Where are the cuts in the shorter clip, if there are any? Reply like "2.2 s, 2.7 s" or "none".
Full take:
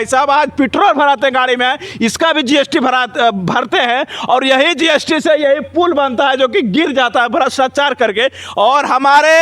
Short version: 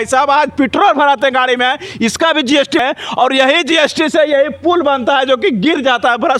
2.8 s

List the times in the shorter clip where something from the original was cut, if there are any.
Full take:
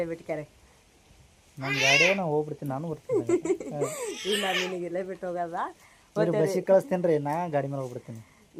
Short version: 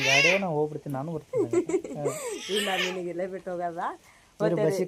none

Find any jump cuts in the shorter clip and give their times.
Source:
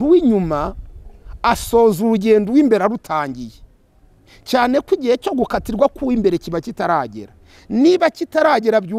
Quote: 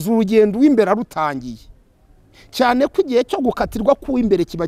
none

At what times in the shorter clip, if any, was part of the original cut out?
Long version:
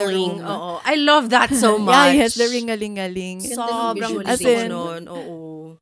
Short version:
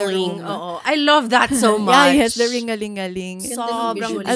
none

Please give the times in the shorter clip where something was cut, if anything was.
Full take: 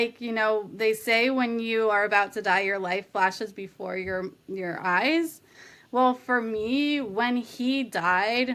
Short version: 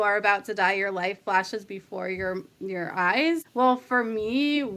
3.5 s

